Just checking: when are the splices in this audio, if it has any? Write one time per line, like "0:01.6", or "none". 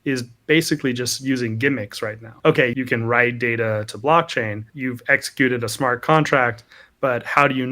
0:02.7
0:04.7

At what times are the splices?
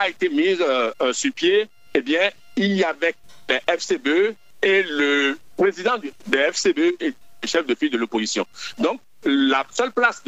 0:03.3
0:07.3

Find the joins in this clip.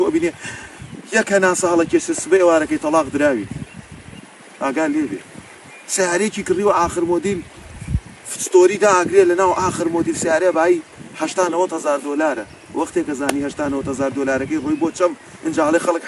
none

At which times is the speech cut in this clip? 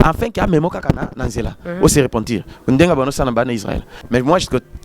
0:03.9

